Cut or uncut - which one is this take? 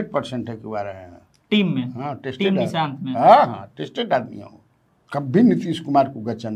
uncut